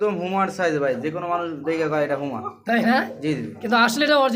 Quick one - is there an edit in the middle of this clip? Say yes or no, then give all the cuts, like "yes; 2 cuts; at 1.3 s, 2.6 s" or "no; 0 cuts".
no; 0 cuts